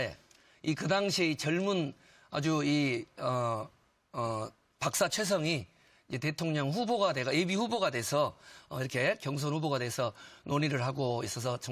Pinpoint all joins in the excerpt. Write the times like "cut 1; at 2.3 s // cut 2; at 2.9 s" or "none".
cut 1; at 7.9 s